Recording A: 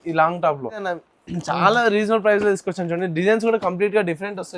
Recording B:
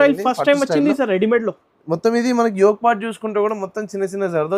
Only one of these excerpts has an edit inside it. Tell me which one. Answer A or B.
A